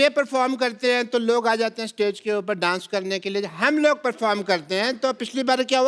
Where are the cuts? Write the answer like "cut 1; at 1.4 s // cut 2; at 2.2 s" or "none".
none